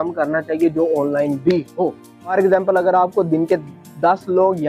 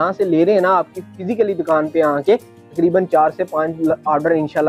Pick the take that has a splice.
first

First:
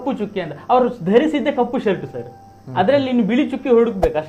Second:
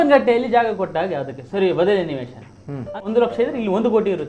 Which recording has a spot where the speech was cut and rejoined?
second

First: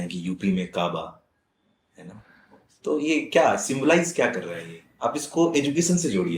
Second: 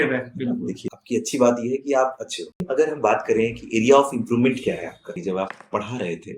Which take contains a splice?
second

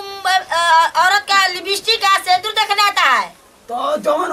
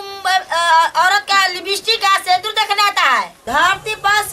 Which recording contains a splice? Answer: second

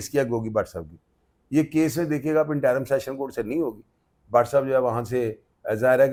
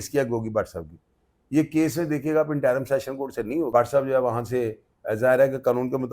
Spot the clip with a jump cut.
second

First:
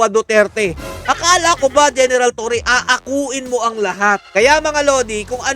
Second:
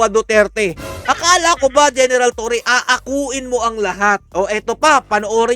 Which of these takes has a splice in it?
first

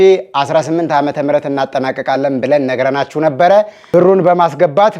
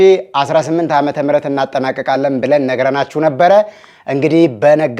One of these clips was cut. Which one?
first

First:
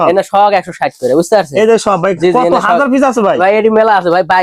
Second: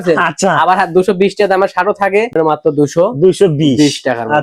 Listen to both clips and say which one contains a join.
second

